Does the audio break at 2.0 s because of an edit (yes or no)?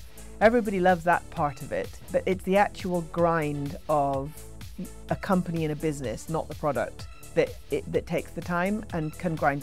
yes